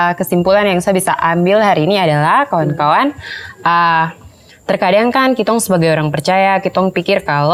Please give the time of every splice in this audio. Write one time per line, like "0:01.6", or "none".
none

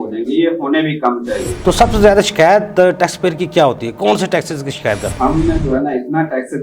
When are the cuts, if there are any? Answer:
0:01.5
0:05.1

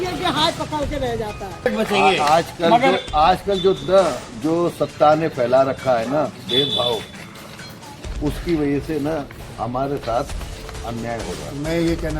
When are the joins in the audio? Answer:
0:01.7

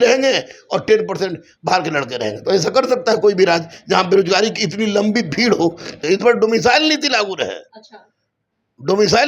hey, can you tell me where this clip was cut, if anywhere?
0:05.9

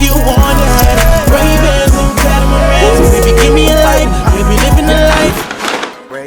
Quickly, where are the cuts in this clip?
none

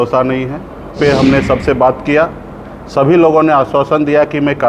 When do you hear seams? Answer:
0:00.9

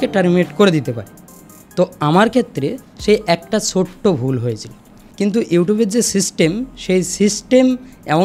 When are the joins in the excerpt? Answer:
0:05.0

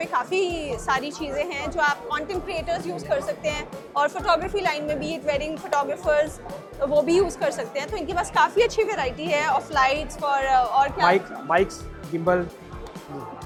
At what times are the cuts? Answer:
none

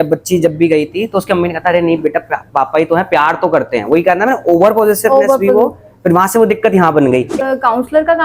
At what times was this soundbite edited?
0:07.3

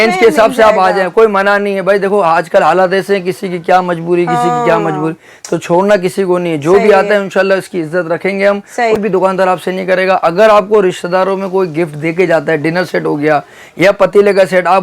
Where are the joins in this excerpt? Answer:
0:09.0

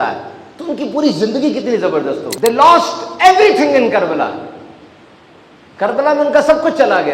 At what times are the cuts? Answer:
0:02.3

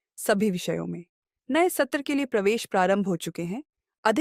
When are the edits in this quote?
none

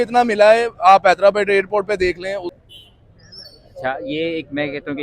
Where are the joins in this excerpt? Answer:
0:02.6

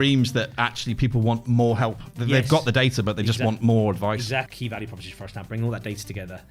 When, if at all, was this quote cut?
0:04.5

